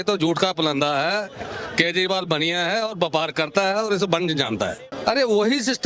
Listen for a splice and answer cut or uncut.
cut